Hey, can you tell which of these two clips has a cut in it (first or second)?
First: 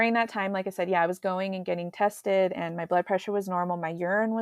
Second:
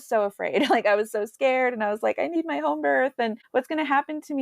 second